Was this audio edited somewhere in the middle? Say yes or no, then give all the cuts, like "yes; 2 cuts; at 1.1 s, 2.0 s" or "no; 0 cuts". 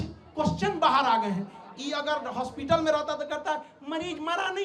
no; 0 cuts